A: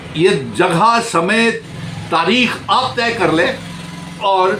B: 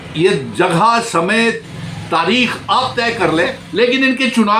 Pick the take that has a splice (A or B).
B